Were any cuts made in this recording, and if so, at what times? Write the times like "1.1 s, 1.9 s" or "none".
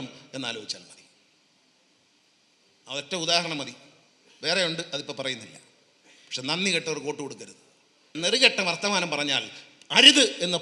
8.1 s